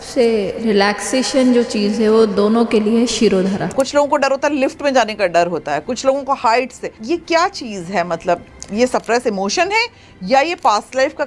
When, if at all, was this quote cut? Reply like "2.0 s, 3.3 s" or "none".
3.7 s, 6.9 s